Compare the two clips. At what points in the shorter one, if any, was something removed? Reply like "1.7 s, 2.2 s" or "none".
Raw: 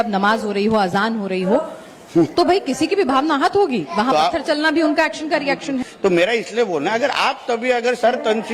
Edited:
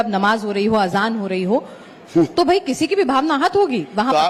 none